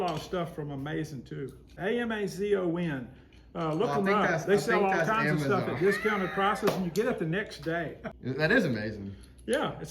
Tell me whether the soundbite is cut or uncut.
cut